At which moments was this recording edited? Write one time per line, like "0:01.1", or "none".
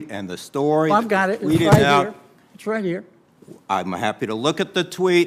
none